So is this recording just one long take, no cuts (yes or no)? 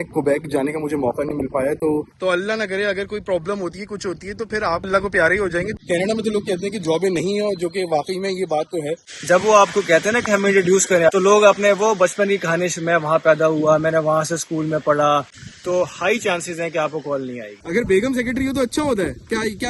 no